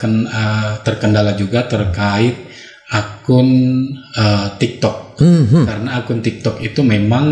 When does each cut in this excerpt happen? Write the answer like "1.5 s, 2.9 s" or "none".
none